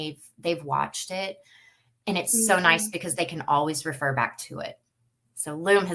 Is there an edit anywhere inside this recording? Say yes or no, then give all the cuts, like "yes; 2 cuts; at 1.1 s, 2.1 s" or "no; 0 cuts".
no; 0 cuts